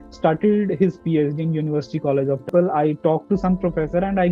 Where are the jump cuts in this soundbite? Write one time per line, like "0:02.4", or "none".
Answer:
0:02.5